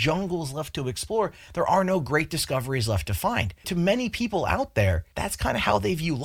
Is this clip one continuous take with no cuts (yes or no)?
no